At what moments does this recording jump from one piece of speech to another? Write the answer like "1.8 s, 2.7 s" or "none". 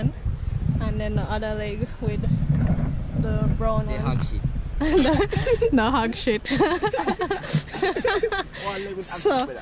none

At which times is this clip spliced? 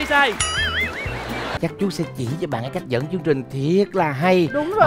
1.5 s

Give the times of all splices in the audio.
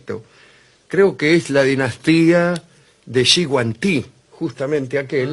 4.0 s

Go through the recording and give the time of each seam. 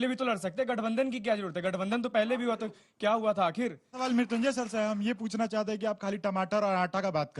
4.0 s

